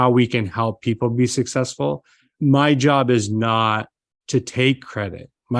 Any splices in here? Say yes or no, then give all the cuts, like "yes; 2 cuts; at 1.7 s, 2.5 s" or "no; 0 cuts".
yes; 1 cut; at 2.3 s